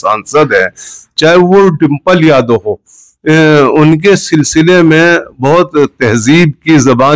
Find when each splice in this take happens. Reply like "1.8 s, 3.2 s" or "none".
none